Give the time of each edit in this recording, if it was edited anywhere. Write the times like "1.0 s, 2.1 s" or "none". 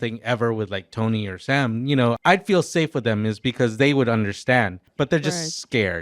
2.2 s, 4.9 s